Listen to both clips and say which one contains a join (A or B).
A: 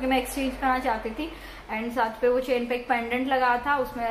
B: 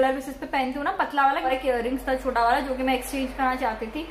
B